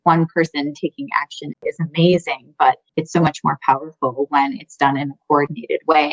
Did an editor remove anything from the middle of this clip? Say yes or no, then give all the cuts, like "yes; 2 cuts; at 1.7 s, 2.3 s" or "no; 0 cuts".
yes; 2 cuts; at 1.6 s, 2.9 s